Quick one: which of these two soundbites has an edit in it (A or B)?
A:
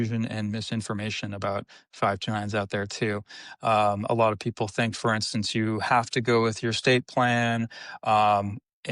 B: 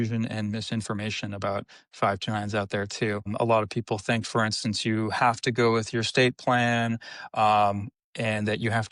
B